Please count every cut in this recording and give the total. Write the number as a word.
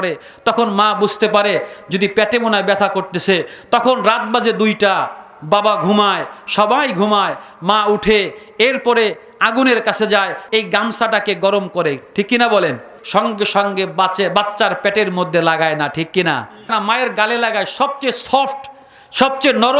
three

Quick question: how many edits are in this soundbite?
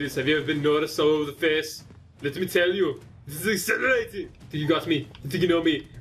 one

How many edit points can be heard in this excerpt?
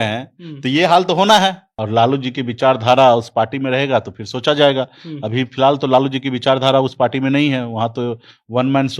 one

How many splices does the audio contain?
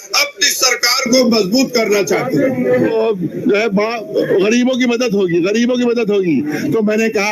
one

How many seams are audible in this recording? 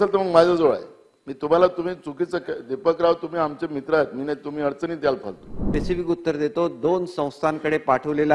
one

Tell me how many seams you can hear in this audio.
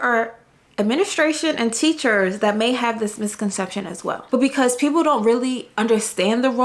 one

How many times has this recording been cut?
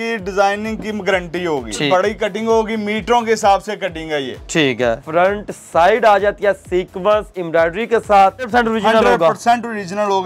three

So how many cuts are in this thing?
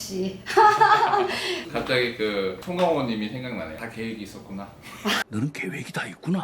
one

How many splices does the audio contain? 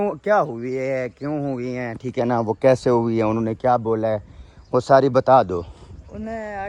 zero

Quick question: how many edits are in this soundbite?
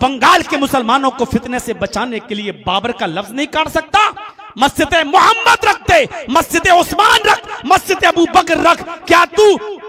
zero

